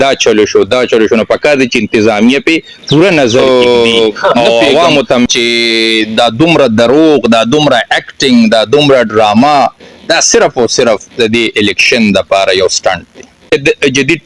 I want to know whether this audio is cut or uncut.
cut